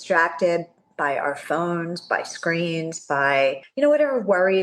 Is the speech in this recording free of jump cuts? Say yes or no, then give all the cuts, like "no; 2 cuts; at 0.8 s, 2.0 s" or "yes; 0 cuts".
no; 1 cut; at 3.7 s